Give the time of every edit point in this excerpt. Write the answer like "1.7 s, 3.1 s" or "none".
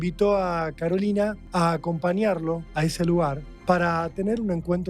1.4 s, 2.7 s, 3.5 s